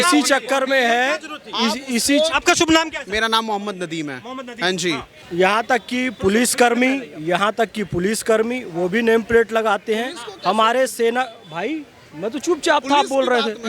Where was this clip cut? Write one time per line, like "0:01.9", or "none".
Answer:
0:05.1

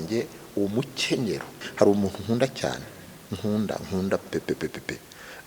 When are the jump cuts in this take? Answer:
0:01.6

